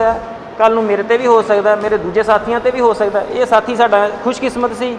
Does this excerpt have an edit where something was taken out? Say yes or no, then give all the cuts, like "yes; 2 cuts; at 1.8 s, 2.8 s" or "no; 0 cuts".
no; 0 cuts